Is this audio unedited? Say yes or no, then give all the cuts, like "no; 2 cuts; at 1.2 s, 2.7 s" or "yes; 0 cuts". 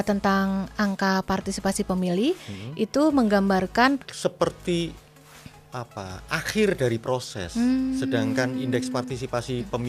no; 1 cut; at 4.0 s